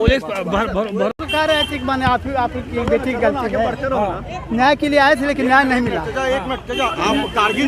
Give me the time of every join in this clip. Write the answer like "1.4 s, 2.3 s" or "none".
1.2 s